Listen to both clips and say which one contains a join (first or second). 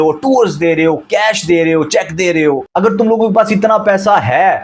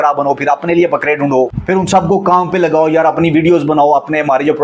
second